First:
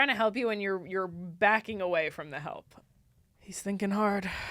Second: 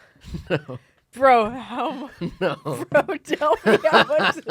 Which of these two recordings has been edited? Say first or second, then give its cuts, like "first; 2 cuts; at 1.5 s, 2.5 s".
first; 1 cut; at 2.8 s